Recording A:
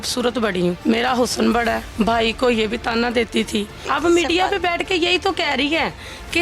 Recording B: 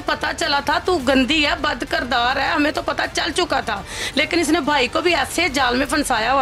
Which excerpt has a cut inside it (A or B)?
A